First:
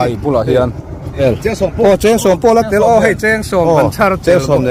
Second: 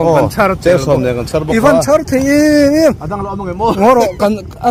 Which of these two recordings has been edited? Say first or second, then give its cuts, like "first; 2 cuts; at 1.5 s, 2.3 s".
first; 1 cut; at 1.2 s